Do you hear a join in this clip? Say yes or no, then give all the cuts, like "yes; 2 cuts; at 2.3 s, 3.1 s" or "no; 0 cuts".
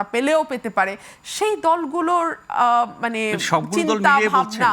no; 0 cuts